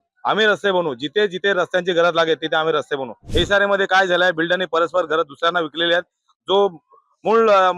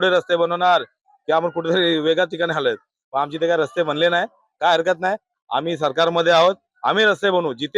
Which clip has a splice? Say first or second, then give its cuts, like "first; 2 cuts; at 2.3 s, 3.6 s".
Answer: first; 1 cut; at 3.2 s